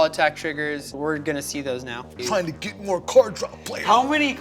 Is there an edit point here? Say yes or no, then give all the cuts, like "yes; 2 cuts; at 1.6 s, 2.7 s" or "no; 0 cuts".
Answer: yes; 1 cut; at 2.0 s